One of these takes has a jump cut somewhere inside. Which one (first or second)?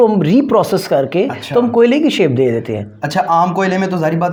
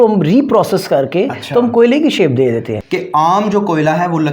second